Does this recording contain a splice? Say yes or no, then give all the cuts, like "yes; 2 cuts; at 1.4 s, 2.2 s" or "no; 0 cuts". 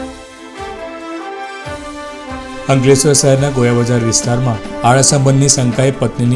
no; 0 cuts